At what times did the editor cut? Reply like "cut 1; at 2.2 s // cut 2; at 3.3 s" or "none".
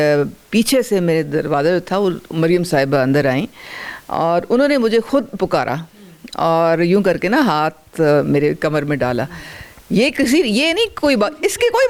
none